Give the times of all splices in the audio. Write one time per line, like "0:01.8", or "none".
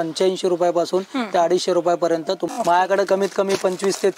0:02.4